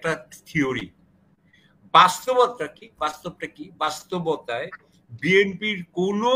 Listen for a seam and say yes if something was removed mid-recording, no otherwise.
no